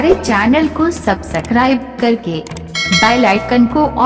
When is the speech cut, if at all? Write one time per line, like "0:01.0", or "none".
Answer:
none